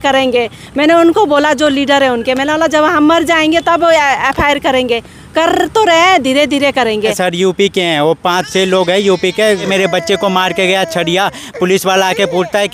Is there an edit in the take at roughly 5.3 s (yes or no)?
no